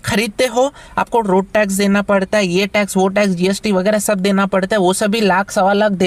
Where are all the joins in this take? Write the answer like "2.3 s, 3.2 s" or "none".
none